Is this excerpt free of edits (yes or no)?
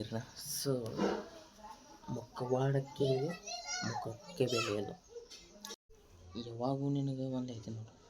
no